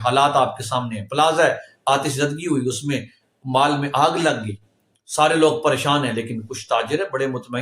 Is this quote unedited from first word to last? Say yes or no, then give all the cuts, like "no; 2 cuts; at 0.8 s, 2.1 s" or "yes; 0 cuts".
yes; 0 cuts